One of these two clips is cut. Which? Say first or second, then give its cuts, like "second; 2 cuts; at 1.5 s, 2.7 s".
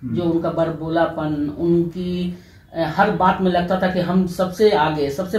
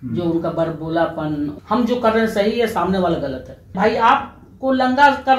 second; 2 cuts; at 1.5 s, 3.7 s